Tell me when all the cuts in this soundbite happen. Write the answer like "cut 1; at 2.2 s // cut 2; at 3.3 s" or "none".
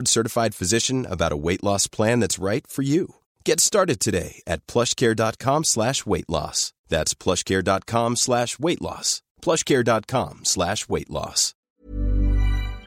cut 1; at 11.7 s